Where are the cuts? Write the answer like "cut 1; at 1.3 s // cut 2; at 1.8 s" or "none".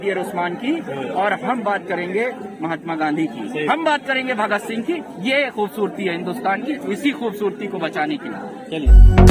none